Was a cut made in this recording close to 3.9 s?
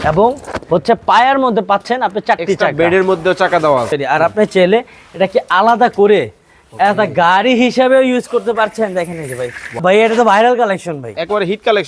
yes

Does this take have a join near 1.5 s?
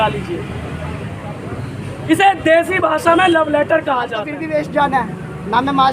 no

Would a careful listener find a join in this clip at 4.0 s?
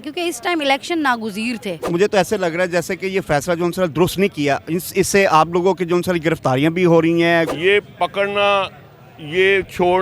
no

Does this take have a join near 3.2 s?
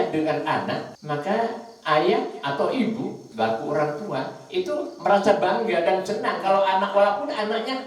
yes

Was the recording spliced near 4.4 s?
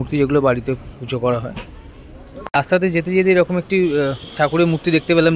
no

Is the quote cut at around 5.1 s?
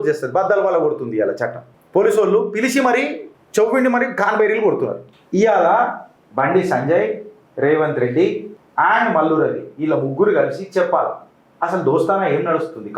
yes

